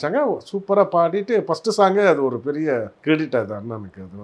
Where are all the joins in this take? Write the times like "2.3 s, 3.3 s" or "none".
2.9 s